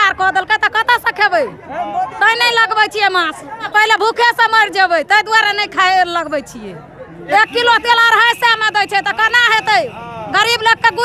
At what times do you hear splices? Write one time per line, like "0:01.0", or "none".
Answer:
0:03.7
0:07.2

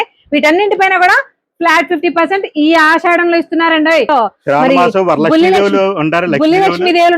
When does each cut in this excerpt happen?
0:04.1

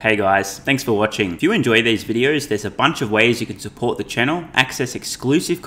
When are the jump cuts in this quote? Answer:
0:00.9

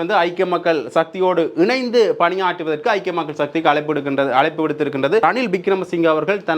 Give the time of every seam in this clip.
0:05.2

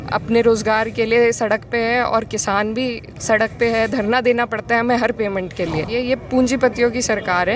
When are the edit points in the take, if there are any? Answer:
0:05.8

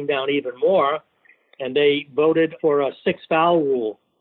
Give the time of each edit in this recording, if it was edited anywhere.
0:02.5

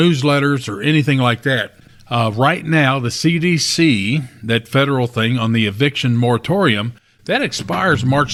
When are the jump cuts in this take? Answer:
none

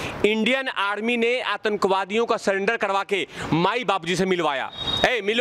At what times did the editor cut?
none

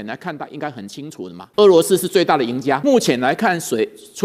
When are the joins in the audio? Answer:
0:01.4
0:02.8

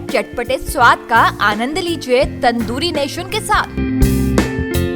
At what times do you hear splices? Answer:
none

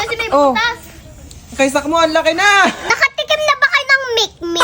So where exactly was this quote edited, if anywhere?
0:02.8

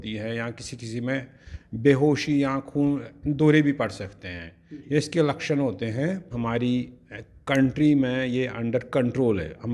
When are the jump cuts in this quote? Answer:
0:06.3

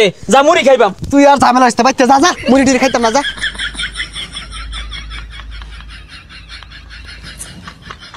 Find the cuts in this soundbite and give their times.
none

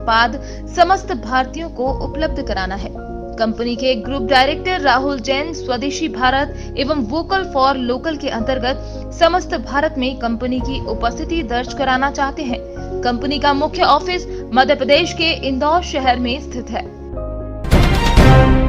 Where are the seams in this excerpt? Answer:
0:17.6

